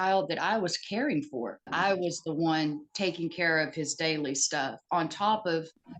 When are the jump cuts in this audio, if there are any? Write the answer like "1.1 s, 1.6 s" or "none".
1.7 s